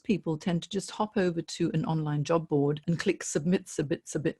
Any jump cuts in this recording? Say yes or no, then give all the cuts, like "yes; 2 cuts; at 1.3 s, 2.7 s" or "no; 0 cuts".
yes; 1 cut; at 2.8 s